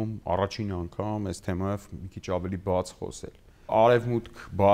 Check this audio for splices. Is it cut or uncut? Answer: cut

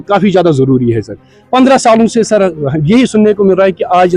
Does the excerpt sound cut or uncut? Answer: uncut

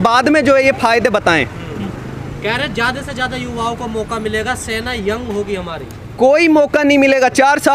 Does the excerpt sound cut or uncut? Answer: uncut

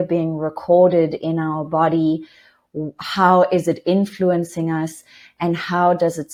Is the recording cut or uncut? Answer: uncut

